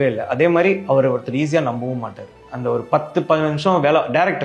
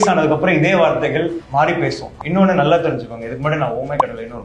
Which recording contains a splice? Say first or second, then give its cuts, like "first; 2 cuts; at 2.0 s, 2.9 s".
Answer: second; 2 cuts; at 1.4 s, 2.1 s